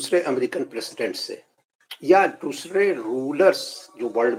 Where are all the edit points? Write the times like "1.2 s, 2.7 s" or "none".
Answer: none